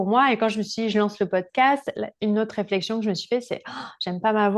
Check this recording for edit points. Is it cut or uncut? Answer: uncut